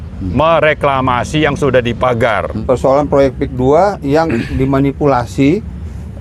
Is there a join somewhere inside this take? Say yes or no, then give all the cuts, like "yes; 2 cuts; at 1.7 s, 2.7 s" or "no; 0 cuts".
yes; 1 cut; at 2.5 s